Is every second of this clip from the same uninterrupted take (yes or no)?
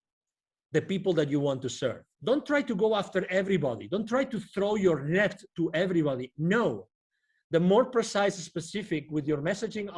no